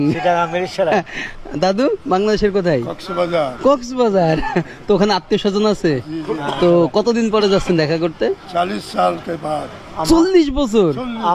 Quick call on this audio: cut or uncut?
uncut